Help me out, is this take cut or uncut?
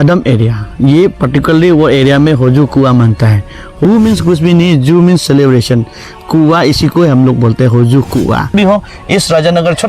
cut